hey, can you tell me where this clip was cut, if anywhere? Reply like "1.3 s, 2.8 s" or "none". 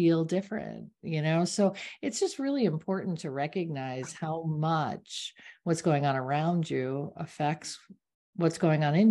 none